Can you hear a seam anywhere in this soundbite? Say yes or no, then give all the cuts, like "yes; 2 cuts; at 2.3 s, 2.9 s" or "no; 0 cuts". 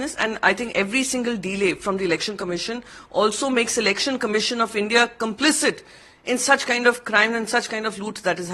no; 0 cuts